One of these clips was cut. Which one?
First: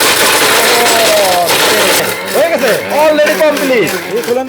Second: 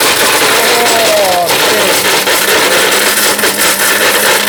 first; 1 cut; at 2.0 s

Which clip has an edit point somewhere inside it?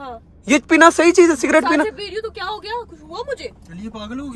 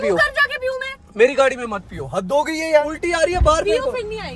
second; 1 cut; at 2.8 s

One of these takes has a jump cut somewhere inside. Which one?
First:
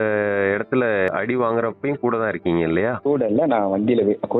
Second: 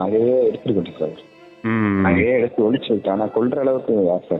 first; 2 cuts; at 1.1 s, 3.0 s

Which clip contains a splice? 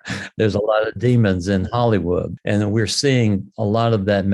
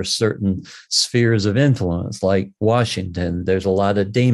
first; 1 cut; at 2.3 s

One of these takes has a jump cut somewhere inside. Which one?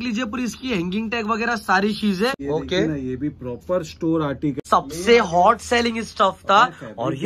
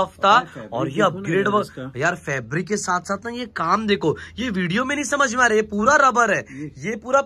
first; 2 cuts; at 2.4 s, 4.6 s

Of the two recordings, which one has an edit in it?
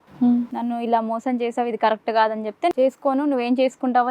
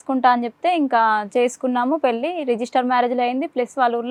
first; 1 cut; at 2.7 s

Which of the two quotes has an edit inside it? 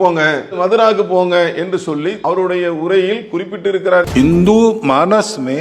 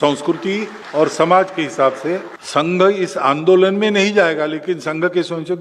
first; 2 cuts; at 2.2 s, 4.1 s

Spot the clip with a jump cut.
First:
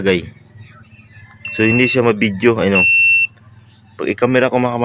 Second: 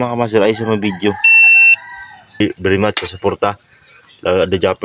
second; 1 cut; at 2.4 s

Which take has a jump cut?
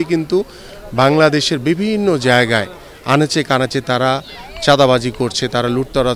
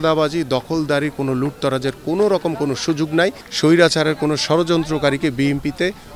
second; 1 cut; at 3.4 s

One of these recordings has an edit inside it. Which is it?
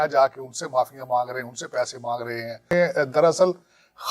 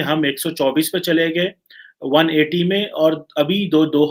first; 1 cut; at 2.6 s

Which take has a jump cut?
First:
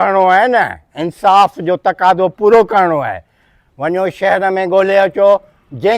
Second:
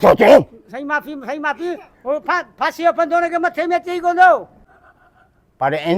second; 1 cut; at 4.6 s

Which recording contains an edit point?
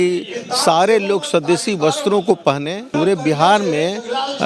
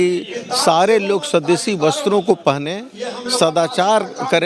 first; 1 cut; at 2.9 s

